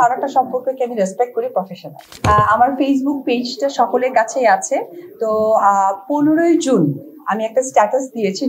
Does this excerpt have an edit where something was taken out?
no; 0 cuts

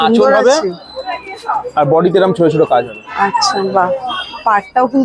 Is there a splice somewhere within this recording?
no; 0 cuts

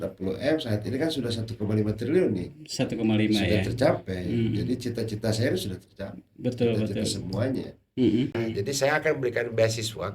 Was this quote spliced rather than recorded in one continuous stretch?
yes; 1 cut; at 8.4 s

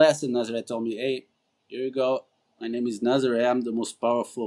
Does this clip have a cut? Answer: no; 0 cuts

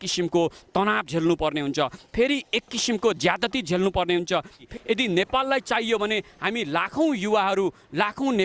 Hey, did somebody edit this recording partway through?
yes; 1 cut; at 4.7 s

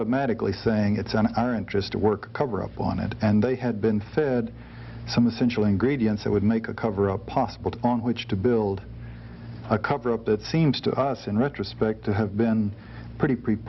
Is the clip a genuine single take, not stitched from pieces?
yes; 0 cuts

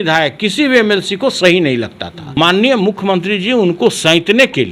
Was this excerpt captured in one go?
no; 1 cut; at 2.2 s

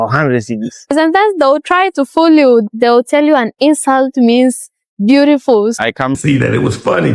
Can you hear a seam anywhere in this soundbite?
yes; 1 cut; at 6.2 s

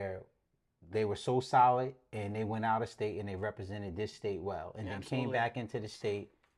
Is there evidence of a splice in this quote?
no; 0 cuts

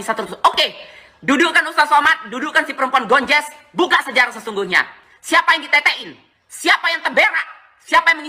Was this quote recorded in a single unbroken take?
yes; 0 cuts

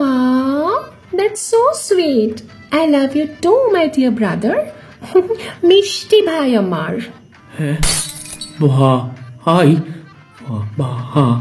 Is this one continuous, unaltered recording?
yes; 0 cuts

